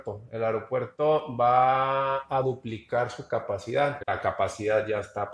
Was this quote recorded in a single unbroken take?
no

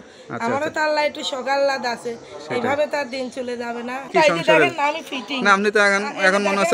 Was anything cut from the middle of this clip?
yes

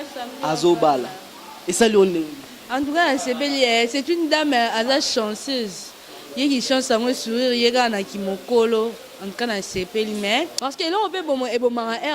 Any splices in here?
yes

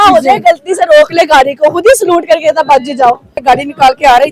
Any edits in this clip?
yes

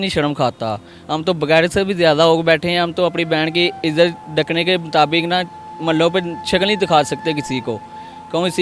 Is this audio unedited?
yes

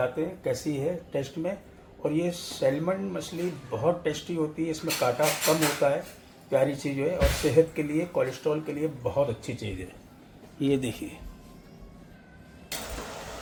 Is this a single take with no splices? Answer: yes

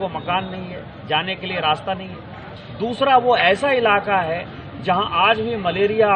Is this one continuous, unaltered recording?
yes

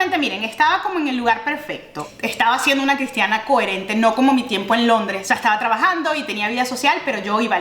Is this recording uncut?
no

